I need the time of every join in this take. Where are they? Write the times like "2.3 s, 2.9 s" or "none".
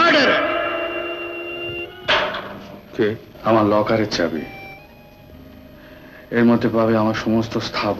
3.3 s